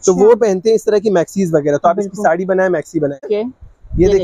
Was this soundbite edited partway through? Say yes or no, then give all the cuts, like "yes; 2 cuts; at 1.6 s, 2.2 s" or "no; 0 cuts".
yes; 1 cut; at 3.2 s